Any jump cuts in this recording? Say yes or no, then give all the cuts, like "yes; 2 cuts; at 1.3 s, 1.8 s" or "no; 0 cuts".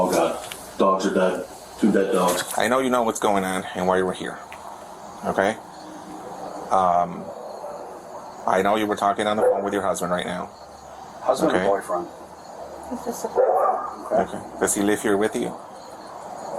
yes; 1 cut; at 2.5 s